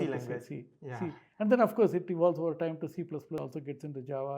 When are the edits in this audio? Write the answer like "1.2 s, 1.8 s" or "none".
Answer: 3.4 s